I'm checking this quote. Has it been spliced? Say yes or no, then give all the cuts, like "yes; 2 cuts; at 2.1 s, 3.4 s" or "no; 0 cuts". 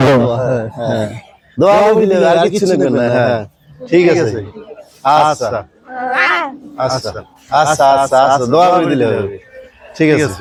no; 0 cuts